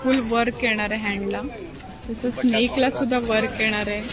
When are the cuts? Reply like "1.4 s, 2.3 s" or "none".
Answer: none